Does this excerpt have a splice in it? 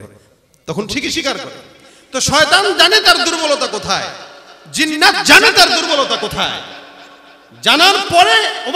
no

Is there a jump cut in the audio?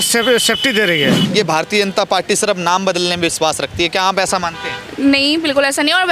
yes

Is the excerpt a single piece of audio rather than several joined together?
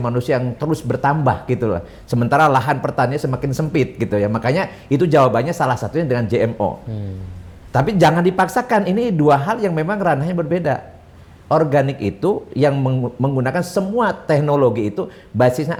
yes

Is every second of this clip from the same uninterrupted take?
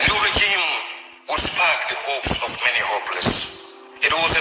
yes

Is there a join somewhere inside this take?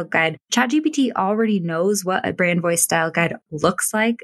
no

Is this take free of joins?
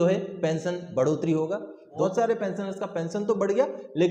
no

